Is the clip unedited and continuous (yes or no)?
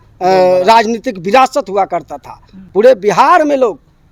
yes